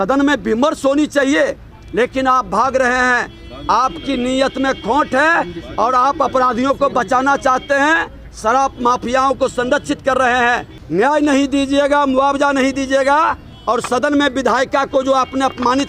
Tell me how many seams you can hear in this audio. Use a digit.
1